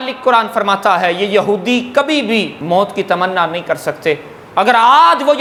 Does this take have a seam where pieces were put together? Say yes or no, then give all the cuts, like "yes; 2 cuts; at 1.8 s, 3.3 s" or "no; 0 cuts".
no; 0 cuts